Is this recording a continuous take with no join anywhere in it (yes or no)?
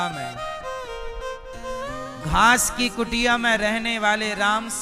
yes